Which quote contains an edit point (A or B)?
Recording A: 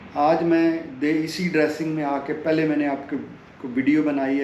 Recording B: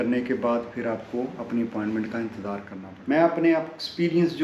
B